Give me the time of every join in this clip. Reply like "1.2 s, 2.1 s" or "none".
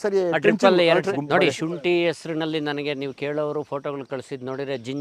1.1 s